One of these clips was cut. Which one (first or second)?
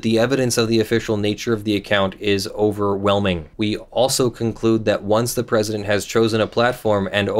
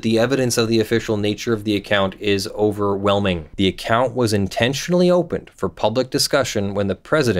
second